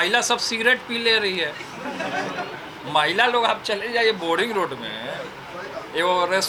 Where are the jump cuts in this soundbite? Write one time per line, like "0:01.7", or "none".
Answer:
none

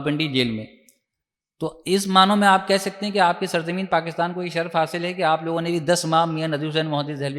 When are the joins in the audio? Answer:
none

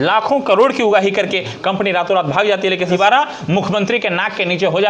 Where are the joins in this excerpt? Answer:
0:02.9

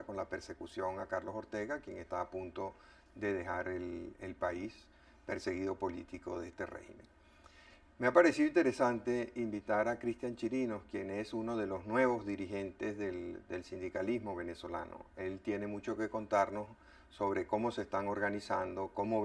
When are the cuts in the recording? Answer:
0:15.0

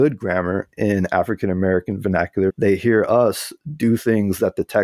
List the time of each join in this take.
0:02.6

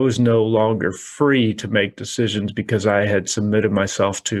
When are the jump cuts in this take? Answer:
none

